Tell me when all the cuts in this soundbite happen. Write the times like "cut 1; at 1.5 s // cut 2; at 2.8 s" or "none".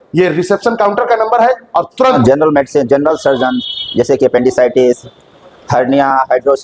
cut 1; at 2.2 s